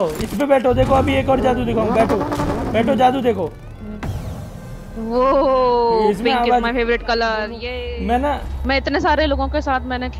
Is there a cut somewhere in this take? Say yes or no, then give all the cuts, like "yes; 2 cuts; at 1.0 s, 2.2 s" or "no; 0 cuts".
yes; 1 cut; at 7.6 s